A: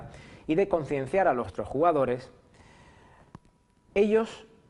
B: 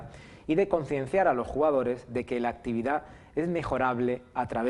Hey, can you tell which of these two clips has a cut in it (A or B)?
B